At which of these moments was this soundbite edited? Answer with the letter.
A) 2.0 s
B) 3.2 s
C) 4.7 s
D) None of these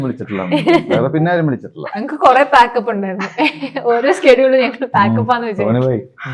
A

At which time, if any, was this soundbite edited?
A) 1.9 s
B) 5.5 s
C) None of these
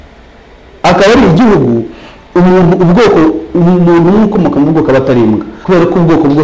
B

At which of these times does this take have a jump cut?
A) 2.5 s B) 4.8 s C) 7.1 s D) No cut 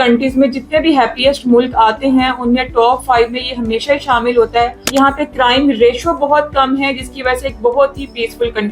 B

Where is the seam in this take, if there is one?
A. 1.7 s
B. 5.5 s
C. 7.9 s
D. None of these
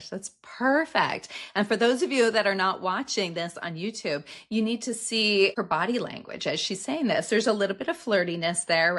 B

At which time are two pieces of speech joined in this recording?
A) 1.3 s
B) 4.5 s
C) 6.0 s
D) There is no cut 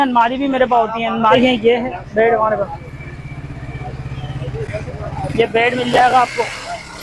A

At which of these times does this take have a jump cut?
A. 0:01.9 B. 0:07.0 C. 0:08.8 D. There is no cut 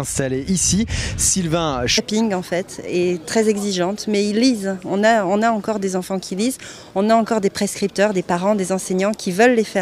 D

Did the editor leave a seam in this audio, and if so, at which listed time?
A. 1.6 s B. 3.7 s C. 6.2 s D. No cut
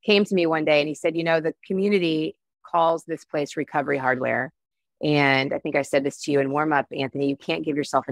A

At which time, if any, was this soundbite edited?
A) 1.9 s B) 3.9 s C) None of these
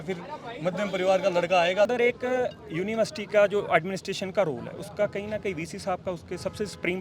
A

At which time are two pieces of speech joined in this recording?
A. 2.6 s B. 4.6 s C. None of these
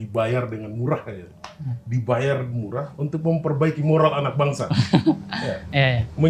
C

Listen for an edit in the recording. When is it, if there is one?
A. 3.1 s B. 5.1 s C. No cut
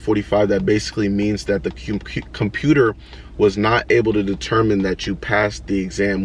C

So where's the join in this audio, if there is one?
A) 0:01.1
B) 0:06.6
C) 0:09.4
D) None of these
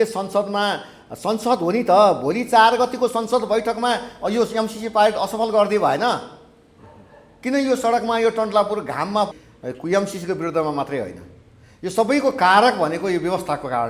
C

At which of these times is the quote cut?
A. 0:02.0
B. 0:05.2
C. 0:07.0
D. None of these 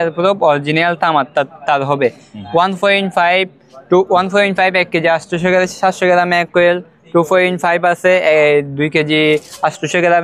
D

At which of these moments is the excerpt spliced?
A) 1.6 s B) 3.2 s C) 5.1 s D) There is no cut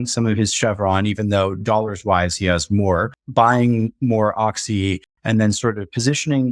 B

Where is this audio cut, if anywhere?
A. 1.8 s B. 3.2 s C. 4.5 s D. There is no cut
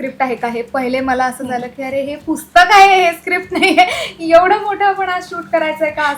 D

